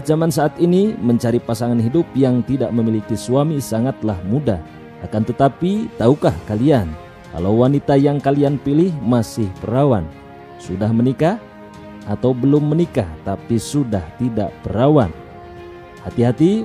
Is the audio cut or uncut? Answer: cut